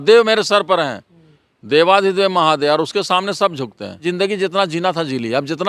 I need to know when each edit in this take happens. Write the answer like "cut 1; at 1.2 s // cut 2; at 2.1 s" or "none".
cut 1; at 4.0 s